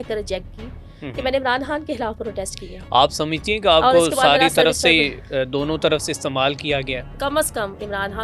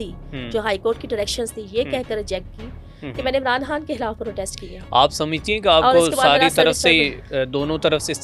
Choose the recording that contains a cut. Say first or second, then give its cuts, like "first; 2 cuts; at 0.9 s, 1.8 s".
first; 1 cut; at 7.2 s